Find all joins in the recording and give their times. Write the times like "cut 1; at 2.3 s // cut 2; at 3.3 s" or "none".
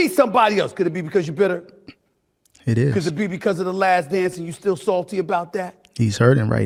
none